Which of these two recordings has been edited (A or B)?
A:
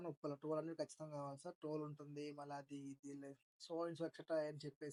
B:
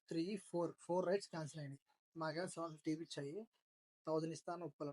B